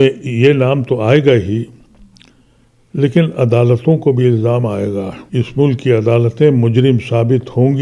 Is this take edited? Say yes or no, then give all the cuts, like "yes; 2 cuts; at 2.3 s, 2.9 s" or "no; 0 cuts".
yes; 1 cut; at 5.2 s